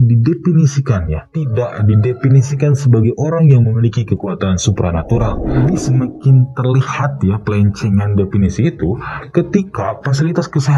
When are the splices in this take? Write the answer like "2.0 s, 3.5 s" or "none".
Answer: 5.6 s